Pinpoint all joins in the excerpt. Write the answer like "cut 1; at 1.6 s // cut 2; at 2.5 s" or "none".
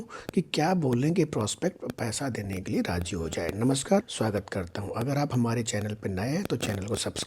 cut 1; at 4.1 s